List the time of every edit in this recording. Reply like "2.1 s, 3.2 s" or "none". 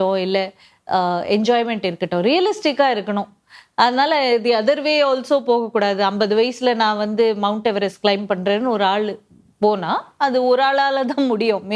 none